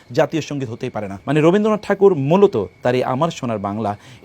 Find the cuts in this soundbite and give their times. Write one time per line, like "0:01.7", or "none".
0:01.1